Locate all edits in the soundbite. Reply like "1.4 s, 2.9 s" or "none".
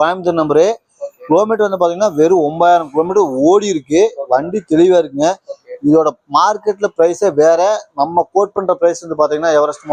none